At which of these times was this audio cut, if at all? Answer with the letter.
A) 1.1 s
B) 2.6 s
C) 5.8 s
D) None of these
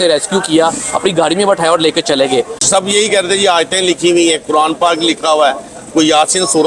B